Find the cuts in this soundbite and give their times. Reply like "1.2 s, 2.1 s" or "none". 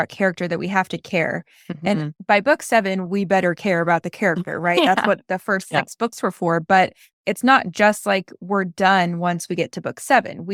none